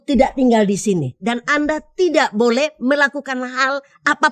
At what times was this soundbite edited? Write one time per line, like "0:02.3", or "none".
none